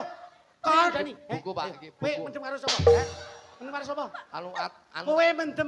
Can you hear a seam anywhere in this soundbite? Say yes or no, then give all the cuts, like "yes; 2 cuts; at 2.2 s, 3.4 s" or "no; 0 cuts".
yes; 1 cut; at 0.9 s